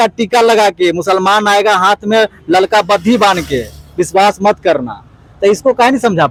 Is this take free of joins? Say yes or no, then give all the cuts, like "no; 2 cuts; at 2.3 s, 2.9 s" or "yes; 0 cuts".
yes; 0 cuts